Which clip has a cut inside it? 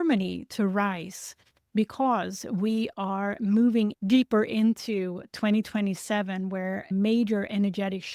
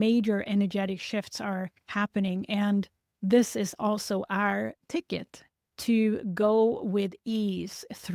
first; 1 cut; at 3.9 s

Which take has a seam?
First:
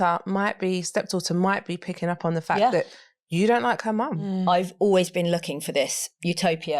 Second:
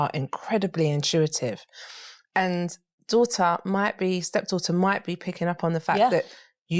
first; 1 cut; at 4.3 s

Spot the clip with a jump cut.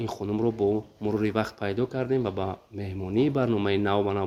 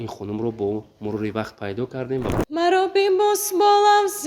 second; 1 cut; at 2.4 s

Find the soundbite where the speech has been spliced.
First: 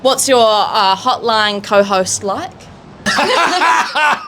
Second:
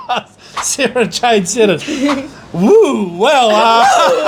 first; 1 cut; at 3.1 s

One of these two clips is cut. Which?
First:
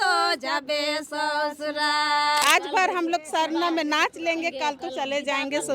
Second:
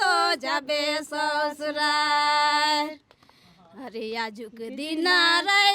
first; 1 cut; at 2.4 s

